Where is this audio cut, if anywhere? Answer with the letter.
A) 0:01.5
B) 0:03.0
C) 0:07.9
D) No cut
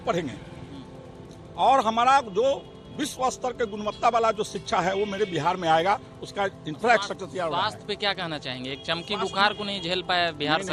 D